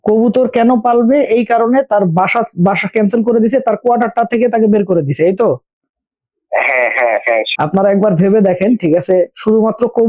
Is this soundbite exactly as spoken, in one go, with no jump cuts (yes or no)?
yes